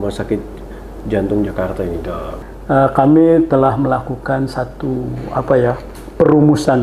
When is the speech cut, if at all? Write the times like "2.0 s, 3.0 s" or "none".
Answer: 2.3 s